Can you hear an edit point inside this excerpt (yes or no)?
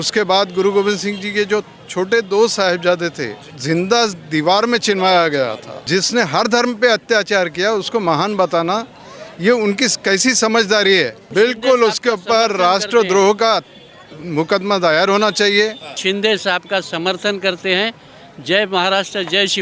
yes